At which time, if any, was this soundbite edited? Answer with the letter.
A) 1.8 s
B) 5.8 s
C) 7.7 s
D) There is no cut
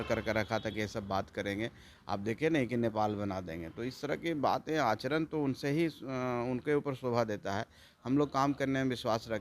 D